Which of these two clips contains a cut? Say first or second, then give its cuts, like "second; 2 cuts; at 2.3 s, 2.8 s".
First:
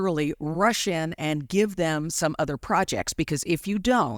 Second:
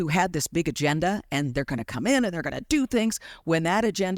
first; 1 cut; at 3.3 s